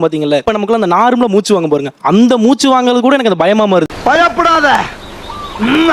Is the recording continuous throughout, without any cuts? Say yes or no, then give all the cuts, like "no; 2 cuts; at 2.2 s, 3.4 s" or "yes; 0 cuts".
yes; 0 cuts